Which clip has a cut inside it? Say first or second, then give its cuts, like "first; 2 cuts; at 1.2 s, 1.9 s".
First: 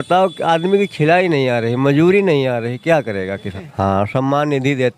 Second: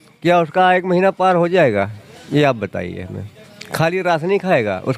first; 1 cut; at 3.6 s